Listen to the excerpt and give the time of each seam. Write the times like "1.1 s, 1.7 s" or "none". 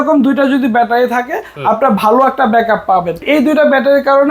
3.2 s